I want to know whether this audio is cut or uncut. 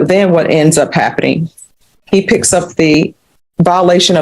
cut